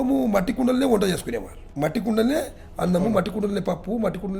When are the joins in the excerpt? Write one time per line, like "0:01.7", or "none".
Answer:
0:01.6